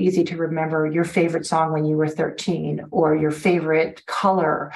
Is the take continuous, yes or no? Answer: no